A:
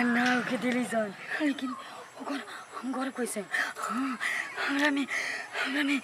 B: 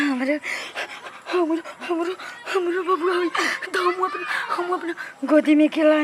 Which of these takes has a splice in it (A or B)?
A